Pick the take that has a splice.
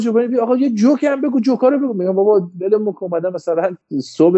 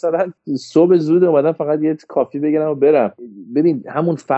second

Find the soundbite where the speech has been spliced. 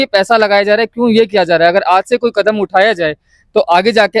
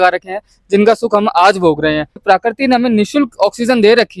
second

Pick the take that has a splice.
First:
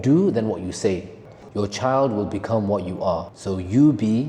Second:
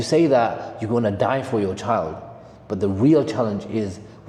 first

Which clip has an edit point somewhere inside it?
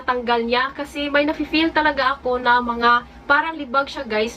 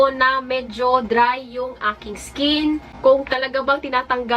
second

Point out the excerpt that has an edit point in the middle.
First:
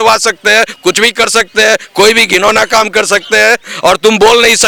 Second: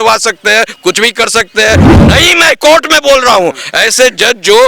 second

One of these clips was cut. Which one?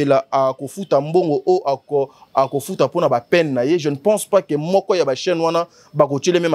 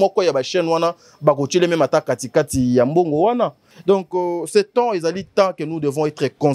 second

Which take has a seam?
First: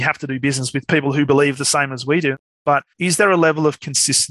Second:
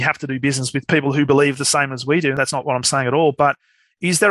first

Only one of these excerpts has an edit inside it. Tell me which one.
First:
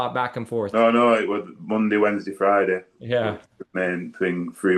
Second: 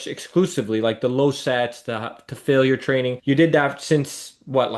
first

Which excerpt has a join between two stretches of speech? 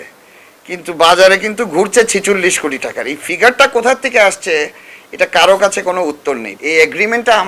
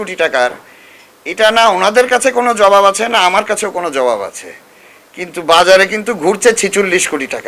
first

